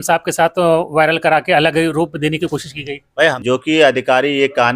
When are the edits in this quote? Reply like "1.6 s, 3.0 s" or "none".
3.4 s

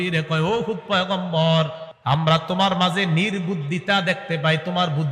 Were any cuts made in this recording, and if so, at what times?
1.9 s

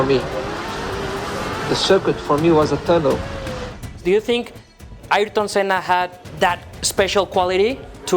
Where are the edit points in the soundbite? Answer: 3.8 s, 6.7 s

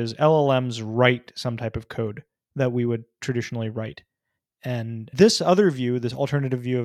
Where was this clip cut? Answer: 5.1 s

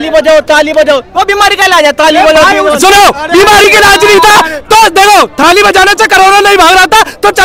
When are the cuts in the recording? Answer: none

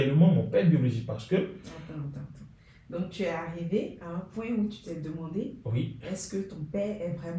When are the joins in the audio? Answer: none

